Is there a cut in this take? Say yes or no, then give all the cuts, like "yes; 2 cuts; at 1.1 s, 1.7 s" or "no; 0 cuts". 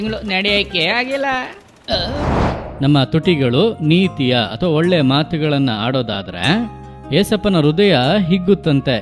yes; 1 cut; at 2.6 s